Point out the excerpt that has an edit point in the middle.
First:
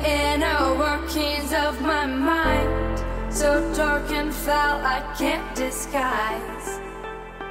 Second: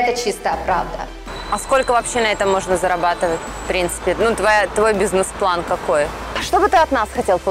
second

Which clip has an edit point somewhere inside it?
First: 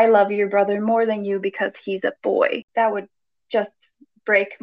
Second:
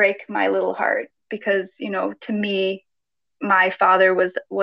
first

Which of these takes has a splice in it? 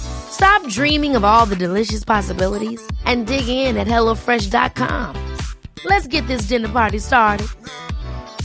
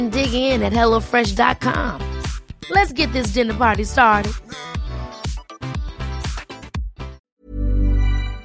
second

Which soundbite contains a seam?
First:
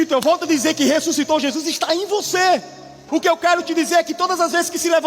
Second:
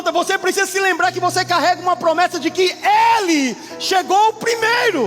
first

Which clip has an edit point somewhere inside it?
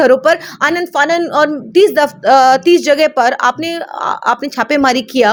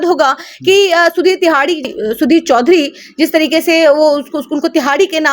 second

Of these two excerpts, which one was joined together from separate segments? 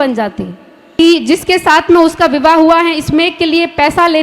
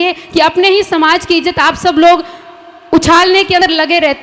first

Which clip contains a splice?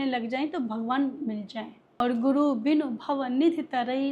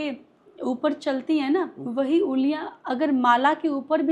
first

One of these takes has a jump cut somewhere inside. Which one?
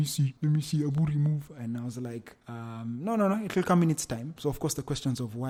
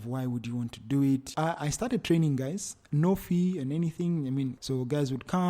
second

